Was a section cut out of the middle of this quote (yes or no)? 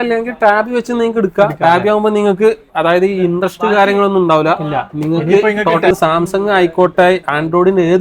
yes